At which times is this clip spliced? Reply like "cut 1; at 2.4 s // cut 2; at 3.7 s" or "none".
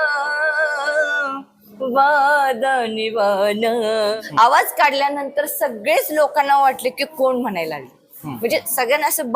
cut 1; at 4.2 s